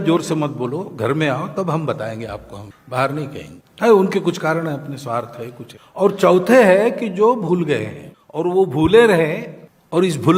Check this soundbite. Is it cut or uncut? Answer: uncut